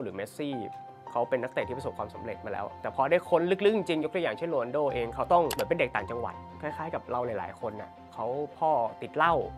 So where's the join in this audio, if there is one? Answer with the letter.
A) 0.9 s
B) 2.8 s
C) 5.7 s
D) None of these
B